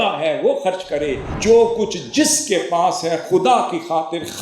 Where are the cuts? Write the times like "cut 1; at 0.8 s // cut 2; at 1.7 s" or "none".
cut 1; at 1.3 s